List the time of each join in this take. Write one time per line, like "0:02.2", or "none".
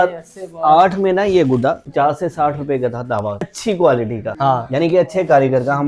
0:01.8
0:03.5
0:04.3